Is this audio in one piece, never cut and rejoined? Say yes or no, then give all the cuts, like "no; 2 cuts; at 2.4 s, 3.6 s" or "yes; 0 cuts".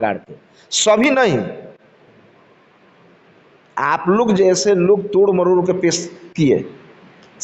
yes; 0 cuts